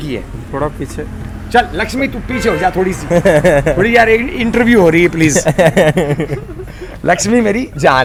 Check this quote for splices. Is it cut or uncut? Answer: uncut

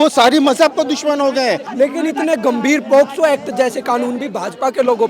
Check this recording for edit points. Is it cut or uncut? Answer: cut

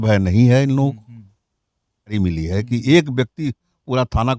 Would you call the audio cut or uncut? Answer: cut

